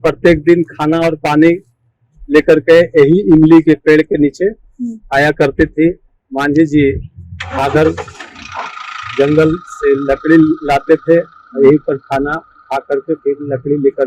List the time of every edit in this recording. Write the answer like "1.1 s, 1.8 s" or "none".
none